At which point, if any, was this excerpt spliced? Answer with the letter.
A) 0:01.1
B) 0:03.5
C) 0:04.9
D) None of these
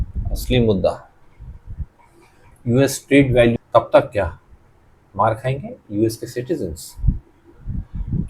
B